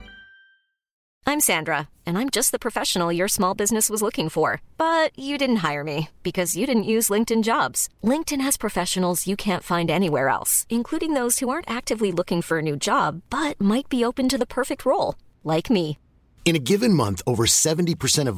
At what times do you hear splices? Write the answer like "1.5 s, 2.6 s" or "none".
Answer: 1.0 s